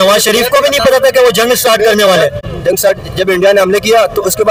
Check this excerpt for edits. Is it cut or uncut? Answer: uncut